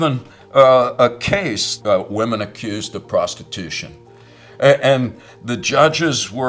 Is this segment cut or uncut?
cut